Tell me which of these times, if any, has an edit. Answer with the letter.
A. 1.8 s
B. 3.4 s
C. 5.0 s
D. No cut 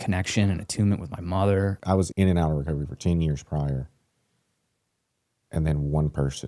A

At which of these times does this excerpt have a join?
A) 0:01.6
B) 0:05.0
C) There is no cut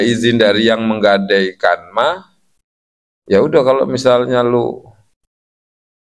C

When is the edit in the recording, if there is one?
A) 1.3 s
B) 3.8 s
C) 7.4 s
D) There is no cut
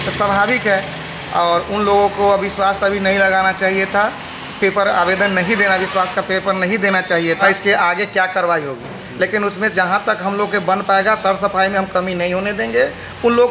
C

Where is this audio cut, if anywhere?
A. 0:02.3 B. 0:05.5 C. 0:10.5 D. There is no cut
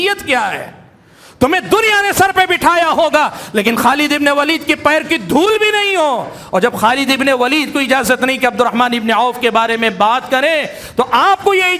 D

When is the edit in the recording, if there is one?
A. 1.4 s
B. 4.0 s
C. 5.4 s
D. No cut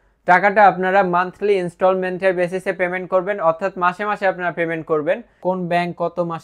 C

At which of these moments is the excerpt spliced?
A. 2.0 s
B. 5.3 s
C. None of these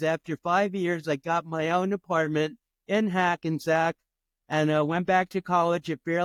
C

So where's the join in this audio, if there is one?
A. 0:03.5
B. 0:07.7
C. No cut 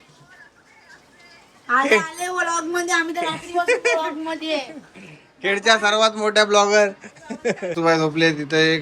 B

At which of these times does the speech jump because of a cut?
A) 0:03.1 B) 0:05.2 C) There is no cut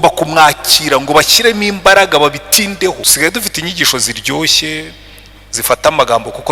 A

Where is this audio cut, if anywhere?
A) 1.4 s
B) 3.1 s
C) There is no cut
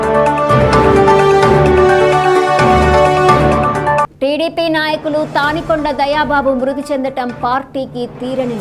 A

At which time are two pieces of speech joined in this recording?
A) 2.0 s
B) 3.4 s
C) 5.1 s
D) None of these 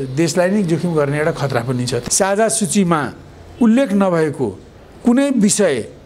A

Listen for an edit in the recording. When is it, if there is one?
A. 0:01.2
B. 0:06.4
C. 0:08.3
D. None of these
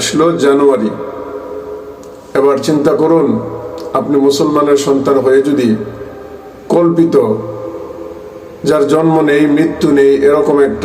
D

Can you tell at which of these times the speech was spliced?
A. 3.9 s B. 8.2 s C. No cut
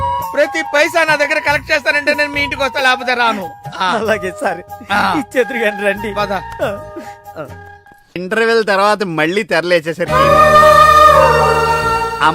B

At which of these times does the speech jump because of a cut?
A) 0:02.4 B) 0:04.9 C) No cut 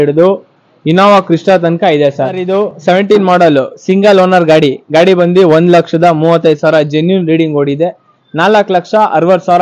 A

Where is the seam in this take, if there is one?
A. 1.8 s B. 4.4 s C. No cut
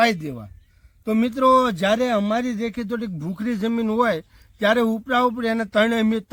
C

